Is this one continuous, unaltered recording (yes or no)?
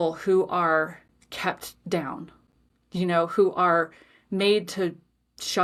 yes